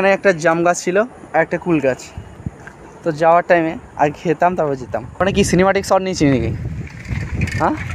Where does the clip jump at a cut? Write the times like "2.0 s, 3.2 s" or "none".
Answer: 5.0 s